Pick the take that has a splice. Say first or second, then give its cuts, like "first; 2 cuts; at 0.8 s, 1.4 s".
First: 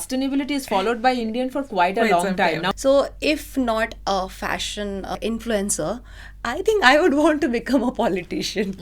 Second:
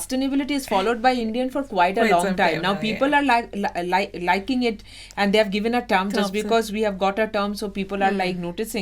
first; 2 cuts; at 2.7 s, 5.2 s